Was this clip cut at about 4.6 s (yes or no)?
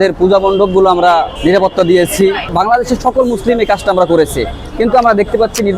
no